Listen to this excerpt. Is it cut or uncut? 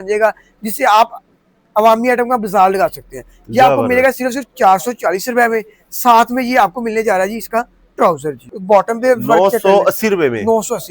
cut